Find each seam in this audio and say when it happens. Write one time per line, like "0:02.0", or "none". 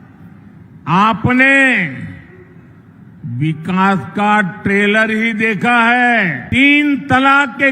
0:06.4